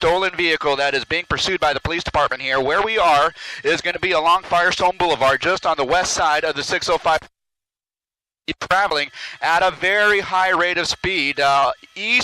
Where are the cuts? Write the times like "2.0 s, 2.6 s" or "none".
none